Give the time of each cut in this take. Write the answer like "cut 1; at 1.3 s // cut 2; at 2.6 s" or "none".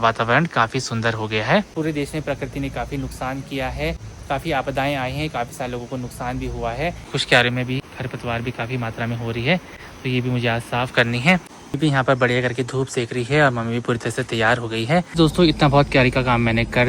cut 1; at 1.7 s // cut 2; at 7.0 s // cut 3; at 11.6 s // cut 4; at 15.1 s